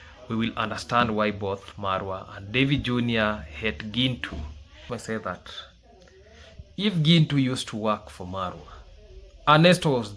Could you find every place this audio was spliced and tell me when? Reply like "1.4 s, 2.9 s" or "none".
4.8 s